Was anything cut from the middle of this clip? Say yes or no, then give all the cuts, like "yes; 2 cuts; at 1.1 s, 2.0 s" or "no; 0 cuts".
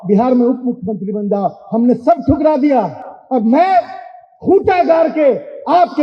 no; 0 cuts